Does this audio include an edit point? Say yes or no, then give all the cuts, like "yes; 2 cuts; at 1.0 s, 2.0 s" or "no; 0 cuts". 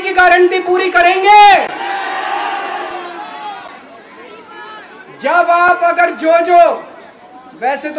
no; 0 cuts